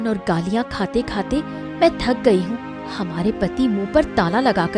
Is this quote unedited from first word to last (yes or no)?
yes